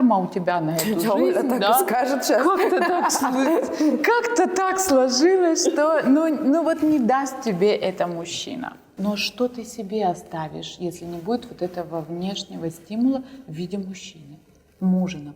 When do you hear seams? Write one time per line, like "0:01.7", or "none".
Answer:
0:08.9

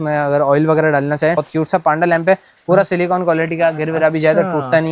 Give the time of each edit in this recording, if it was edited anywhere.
0:01.4

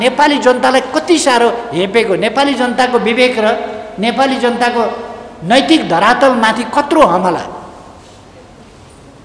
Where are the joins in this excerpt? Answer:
none

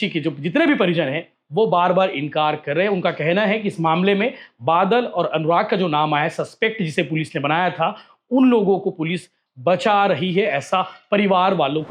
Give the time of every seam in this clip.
none

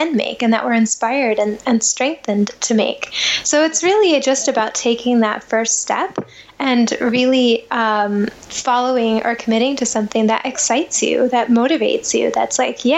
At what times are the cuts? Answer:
none

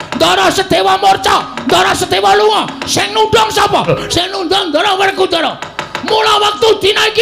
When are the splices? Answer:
0:03.9

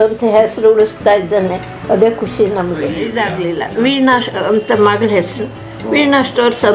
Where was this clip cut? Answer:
0:03.0

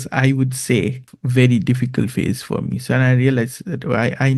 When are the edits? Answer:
0:01.0

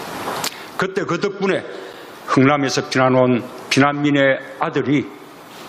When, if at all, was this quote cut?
none

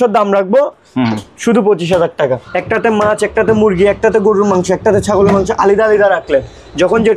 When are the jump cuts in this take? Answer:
0:02.5

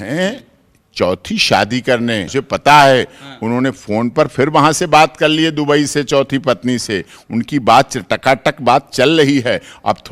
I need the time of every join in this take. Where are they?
0:02.3

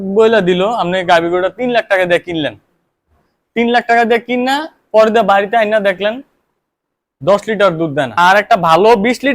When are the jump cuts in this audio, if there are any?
0:08.1

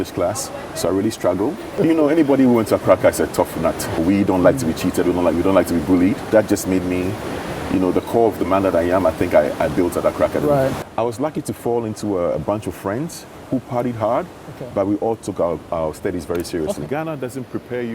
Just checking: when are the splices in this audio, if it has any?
0:01.7
0:04.0
0:06.3
0:10.8
0:16.9

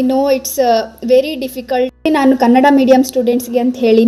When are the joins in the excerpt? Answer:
0:02.1

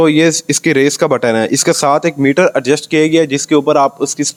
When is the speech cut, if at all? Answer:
none

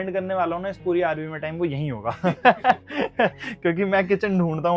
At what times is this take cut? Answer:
none

